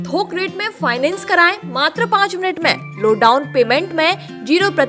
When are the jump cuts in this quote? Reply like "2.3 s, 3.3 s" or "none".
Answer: none